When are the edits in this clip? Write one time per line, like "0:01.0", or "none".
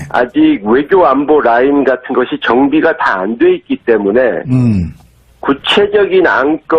0:04.1